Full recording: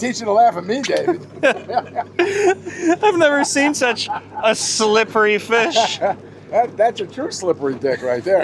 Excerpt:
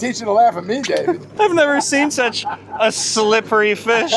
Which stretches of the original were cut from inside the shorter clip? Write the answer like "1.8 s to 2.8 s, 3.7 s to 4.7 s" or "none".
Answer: 1.3 s to 3.0 s